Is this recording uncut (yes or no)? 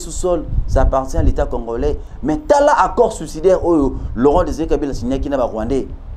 yes